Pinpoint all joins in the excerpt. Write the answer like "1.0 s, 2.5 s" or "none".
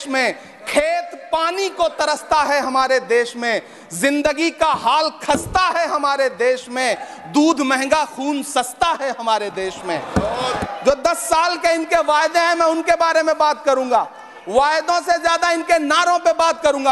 10.6 s